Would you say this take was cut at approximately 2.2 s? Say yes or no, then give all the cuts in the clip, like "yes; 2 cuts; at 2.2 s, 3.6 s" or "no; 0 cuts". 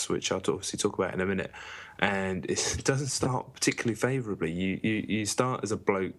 yes; 1 cut; at 2.2 s